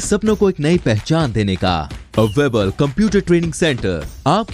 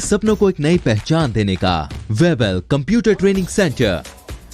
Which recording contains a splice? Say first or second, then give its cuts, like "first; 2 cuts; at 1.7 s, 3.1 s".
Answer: second; 1 cut; at 1.9 s